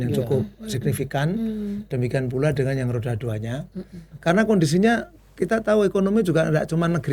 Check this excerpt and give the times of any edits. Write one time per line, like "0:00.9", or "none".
0:04.0